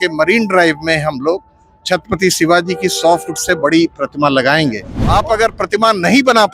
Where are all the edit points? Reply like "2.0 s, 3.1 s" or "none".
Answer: 4.9 s